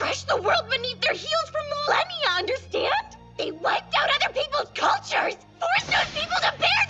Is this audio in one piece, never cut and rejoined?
yes; 0 cuts

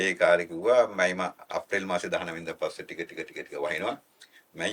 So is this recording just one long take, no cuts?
yes; 0 cuts

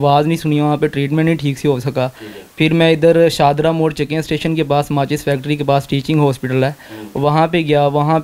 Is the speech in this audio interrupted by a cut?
no; 0 cuts

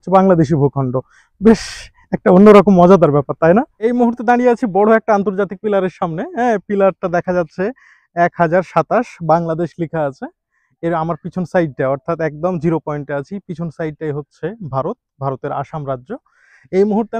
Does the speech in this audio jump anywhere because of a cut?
yes; 1 cut; at 3.8 s

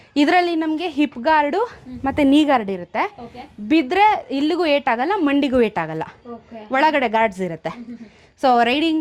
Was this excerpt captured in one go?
yes; 0 cuts

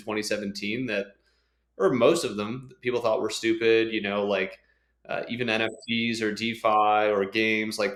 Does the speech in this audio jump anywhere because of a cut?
no; 0 cuts

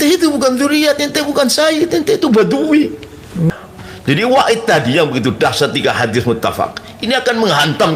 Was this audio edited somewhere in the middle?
yes; 1 cut; at 3.5 s

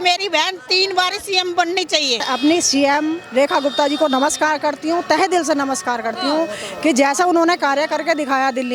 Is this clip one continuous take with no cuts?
no; 1 cut; at 2.2 s

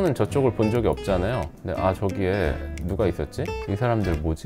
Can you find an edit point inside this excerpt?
yes; 1 cut; at 1.6 s

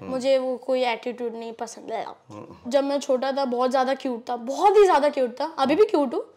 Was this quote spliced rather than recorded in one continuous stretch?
yes; 1 cut; at 2.7 s

